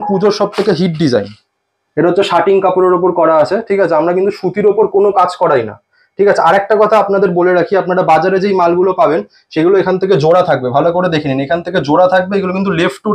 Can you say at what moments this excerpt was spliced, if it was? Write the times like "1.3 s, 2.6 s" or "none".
none